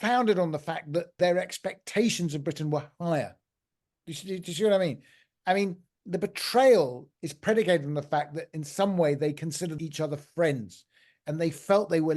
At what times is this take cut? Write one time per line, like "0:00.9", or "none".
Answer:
0:01.2
0:09.8